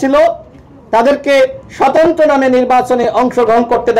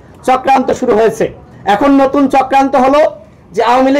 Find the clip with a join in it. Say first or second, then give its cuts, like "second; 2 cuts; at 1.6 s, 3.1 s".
second; 1 cut; at 1.5 s